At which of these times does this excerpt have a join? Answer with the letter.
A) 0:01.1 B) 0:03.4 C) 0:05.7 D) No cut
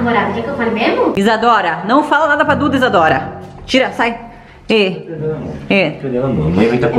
A